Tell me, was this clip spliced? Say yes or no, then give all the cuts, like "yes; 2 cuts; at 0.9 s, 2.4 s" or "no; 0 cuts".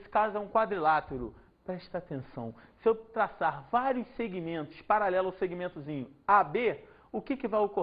yes; 1 cut; at 2.5 s